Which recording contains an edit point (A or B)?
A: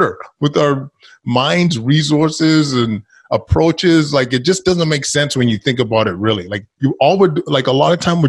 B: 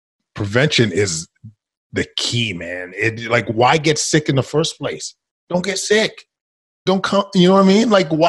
B